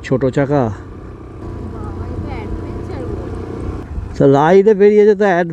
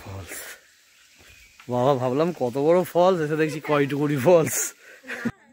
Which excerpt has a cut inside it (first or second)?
first